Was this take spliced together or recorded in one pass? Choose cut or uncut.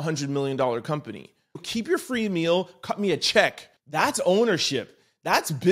cut